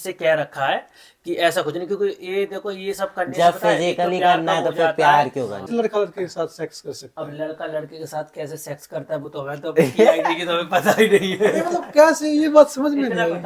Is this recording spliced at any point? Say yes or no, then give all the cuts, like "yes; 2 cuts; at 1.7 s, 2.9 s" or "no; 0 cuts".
yes; 1 cut; at 5.7 s